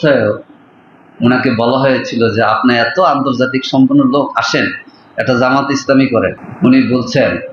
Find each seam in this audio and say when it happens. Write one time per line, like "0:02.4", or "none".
0:06.4